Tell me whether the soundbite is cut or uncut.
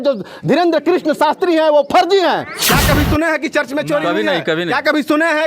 cut